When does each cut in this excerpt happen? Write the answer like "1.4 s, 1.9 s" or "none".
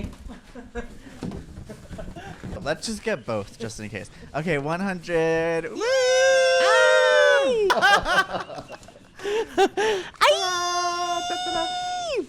2.6 s, 7.7 s